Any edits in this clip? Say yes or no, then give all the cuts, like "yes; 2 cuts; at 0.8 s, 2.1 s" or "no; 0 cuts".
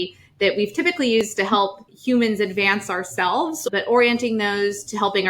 yes; 2 cuts; at 1.5 s, 3.7 s